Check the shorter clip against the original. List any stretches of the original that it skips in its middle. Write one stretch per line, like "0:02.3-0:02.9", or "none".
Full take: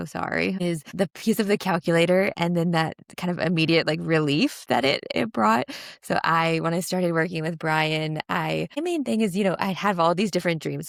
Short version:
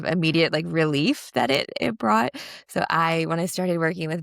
none